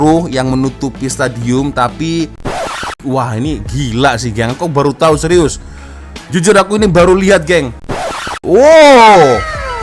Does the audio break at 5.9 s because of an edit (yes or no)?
no